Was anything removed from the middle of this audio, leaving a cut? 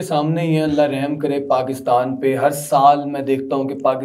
no; 0 cuts

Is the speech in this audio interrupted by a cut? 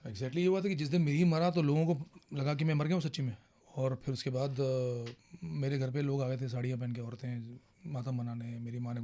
no; 0 cuts

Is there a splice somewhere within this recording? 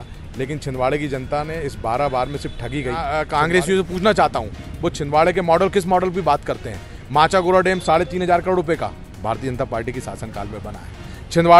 yes; 1 cut; at 3.0 s

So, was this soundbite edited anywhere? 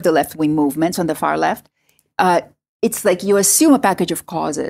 no; 0 cuts

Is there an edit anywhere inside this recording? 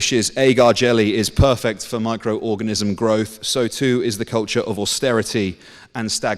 no; 0 cuts

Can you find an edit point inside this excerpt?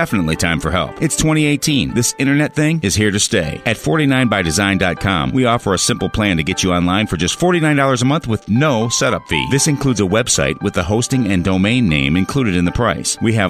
no; 0 cuts

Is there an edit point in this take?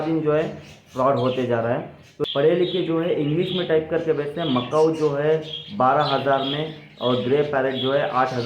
yes; 1 cut; at 2.0 s

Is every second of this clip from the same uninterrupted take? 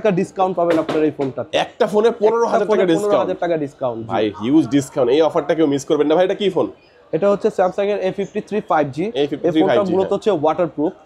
yes; 0 cuts

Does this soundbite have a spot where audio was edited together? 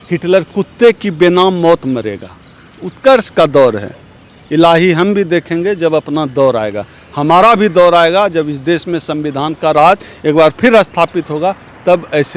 no; 0 cuts

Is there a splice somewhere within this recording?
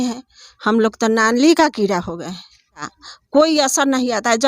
yes; 1 cut; at 2.9 s

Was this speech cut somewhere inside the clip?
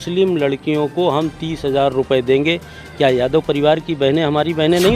no; 0 cuts

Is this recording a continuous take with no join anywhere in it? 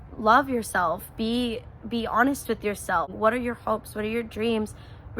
no; 1 cut; at 3.1 s

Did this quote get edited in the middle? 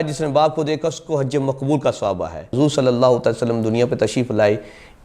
yes; 1 cut; at 2.5 s

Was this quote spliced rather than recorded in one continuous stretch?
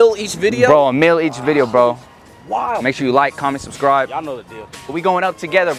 yes; 1 cut; at 4.9 s

